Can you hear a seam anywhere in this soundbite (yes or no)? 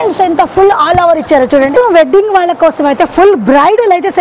yes